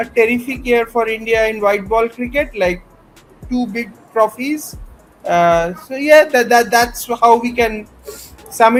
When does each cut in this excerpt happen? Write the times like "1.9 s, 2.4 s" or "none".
none